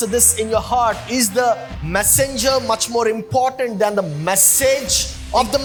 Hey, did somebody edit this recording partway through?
no; 0 cuts

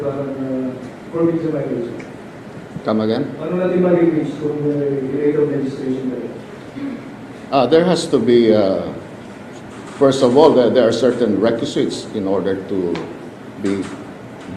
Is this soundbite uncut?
yes; 0 cuts

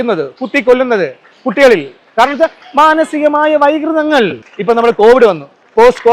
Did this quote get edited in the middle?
yes; 1 cut; at 4.5 s

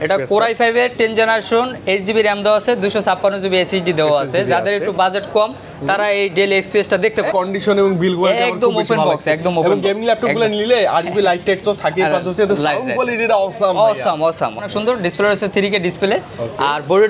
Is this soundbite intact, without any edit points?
no; 2 cuts; at 7.3 s, 14.6 s

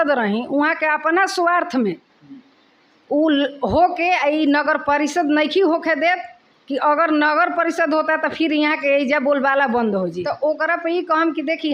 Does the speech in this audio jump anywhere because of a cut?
yes; 1 cut; at 10.2 s

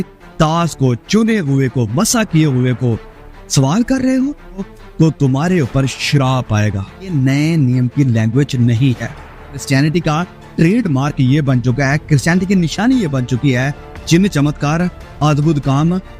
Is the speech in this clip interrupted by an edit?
yes; 3 cuts; at 4.7 s, 7.1 s, 9.6 s

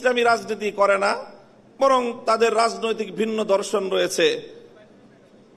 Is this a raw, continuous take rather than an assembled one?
yes; 0 cuts

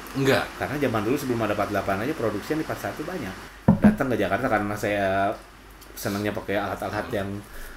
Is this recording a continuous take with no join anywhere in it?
no; 1 cut; at 3.4 s

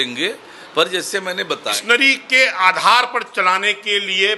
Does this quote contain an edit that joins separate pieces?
yes; 1 cut; at 1.8 s

